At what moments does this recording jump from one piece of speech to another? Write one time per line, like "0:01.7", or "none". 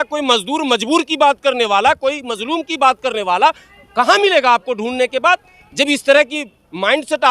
none

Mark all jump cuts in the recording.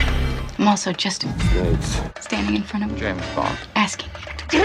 none

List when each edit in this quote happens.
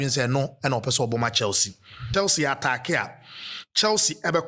0:01.9

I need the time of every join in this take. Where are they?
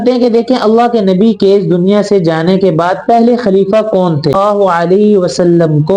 0:04.4

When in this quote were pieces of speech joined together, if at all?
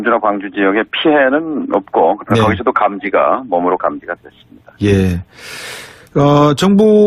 0:01.8

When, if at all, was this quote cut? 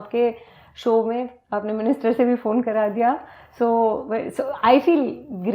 none

